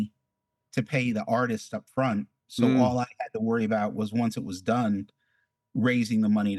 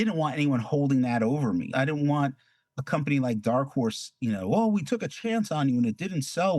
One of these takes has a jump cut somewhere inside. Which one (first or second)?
second